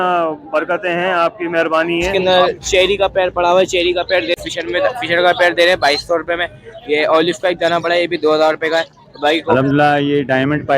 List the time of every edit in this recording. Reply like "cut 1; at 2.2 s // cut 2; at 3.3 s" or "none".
cut 1; at 2.1 s // cut 2; at 4.4 s // cut 3; at 9.5 s